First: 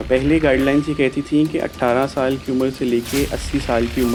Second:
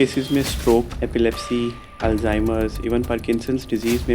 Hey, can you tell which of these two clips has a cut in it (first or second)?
second